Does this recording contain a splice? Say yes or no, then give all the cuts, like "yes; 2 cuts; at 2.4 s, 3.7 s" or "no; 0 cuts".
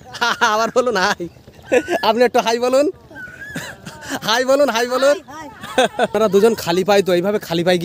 yes; 1 cut; at 6.1 s